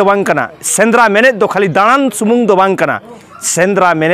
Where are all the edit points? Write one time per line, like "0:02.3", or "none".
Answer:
none